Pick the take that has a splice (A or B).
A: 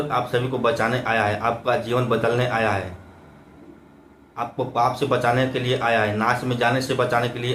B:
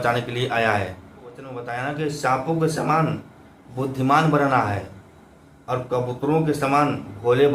B